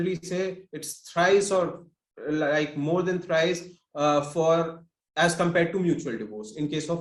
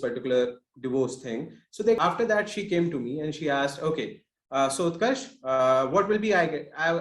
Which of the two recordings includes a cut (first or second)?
second